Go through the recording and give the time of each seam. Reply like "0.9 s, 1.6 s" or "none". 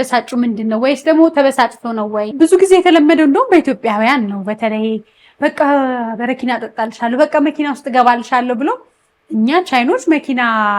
2.3 s